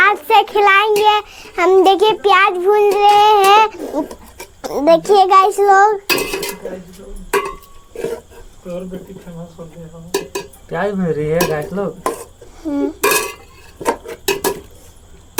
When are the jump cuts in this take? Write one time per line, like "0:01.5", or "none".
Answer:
none